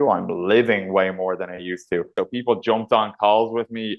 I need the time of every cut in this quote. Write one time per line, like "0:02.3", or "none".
0:02.1